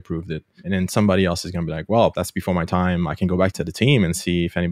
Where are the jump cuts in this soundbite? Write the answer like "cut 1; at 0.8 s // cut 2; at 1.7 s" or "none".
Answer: cut 1; at 2.2 s // cut 2; at 3.5 s